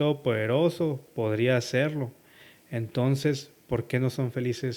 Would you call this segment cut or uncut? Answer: uncut